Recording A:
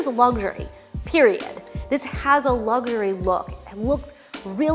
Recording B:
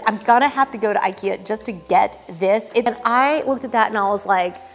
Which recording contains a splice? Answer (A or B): B